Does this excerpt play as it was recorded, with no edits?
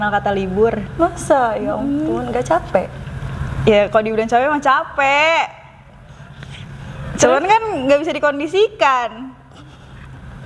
yes; 0 cuts

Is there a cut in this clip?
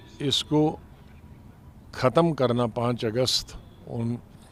no; 0 cuts

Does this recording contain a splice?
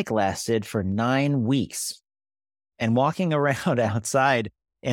no; 0 cuts

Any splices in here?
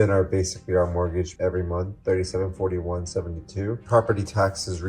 yes; 2 cuts; at 1.3 s, 3.8 s

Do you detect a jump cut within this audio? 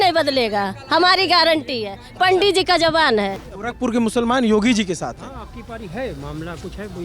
yes; 1 cut; at 3.5 s

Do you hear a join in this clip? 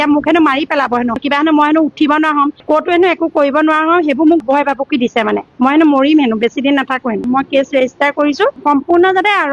yes; 2 cuts; at 1.2 s, 7.2 s

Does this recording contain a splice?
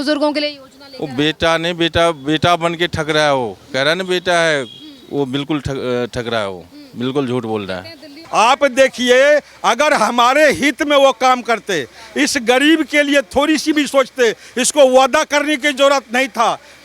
yes; 1 cut; at 8.2 s

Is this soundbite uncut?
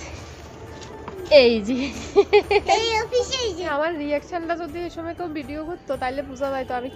no; 1 cut; at 3.7 s

